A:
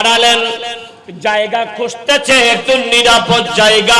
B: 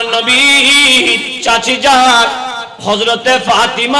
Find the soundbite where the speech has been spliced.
B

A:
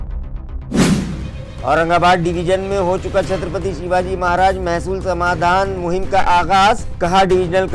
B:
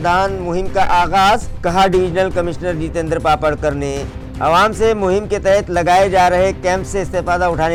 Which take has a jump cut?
A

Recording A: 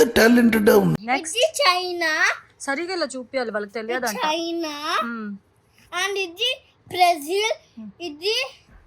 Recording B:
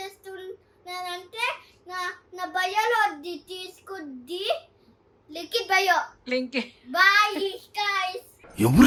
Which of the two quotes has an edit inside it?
A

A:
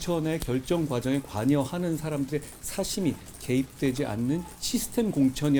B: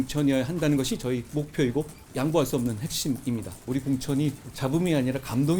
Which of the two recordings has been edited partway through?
B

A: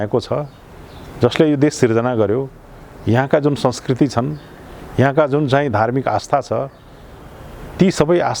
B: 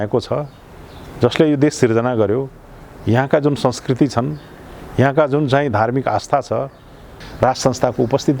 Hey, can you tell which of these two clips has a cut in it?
B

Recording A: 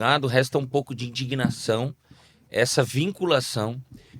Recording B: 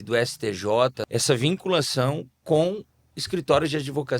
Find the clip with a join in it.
B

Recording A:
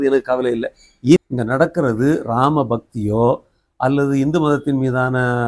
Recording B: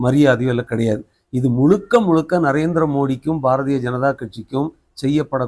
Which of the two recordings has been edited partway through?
A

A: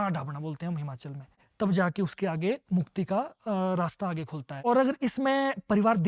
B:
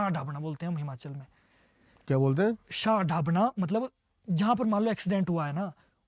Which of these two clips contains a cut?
A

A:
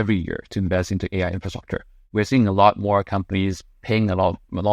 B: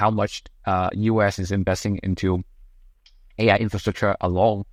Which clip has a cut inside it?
A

